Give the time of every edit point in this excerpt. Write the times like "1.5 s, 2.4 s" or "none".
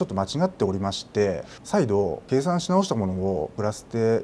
1.5 s